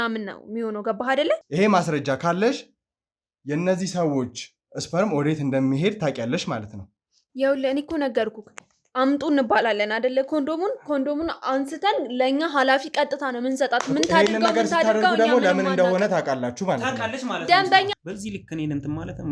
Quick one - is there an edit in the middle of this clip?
yes; 2 cuts; at 1.5 s, 17.9 s

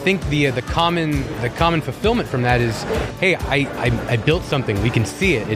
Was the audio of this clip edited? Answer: no; 0 cuts

